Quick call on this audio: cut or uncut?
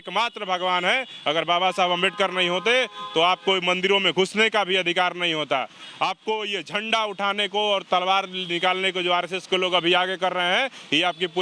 uncut